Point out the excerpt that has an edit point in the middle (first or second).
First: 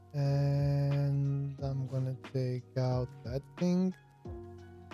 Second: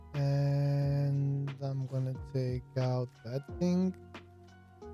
second